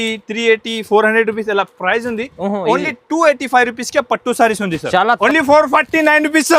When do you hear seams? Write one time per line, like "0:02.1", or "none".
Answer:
0:05.1